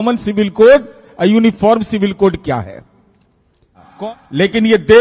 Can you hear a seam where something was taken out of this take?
yes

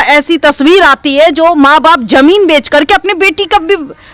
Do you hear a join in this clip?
no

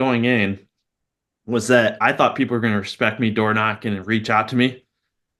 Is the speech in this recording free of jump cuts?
yes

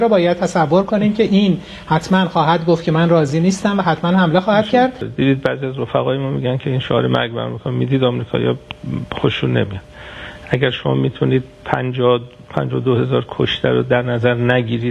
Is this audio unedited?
no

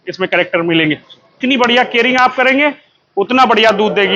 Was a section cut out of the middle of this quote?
yes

